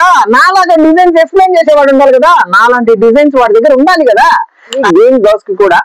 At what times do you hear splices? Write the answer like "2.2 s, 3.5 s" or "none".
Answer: 4.8 s